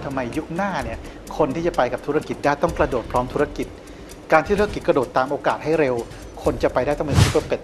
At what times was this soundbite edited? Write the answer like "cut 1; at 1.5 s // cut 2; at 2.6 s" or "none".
none